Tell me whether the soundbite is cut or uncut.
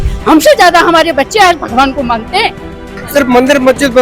cut